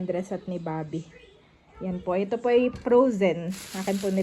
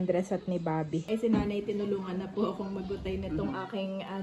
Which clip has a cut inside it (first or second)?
second